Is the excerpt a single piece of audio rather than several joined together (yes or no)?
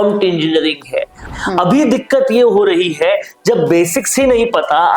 no